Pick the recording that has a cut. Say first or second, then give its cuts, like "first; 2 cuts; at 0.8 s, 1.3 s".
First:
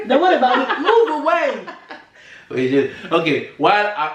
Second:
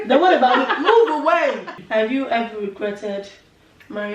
second; 1 cut; at 1.7 s